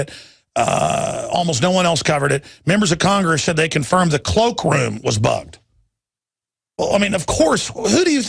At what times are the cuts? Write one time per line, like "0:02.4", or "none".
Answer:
0:01.1